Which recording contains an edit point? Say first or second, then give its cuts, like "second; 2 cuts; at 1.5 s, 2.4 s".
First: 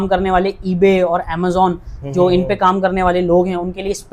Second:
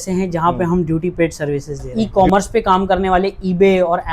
second; 1 cut; at 1.9 s